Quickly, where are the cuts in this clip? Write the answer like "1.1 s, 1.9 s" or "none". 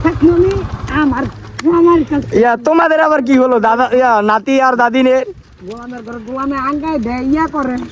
none